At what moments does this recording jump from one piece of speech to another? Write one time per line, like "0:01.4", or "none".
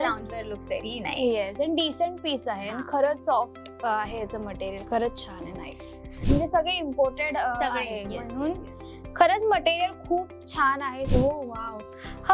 0:06.2
0:11.1